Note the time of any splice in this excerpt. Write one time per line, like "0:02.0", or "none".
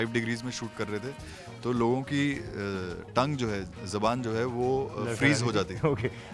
none